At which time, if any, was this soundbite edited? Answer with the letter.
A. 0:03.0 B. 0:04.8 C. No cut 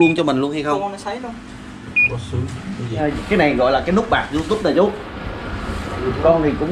A